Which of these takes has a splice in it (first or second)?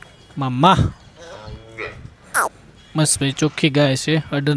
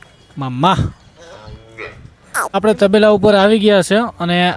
second